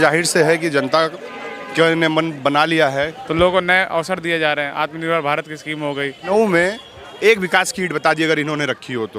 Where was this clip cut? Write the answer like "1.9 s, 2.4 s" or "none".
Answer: 3.2 s, 6.2 s